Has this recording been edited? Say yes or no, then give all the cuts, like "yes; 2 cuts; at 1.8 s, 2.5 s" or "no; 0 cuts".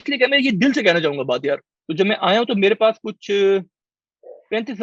yes; 1 cut; at 1.7 s